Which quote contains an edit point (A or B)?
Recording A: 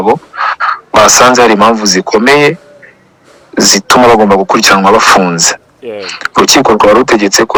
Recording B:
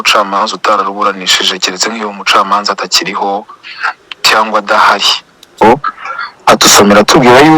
B